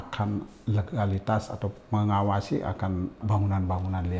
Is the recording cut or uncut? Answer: cut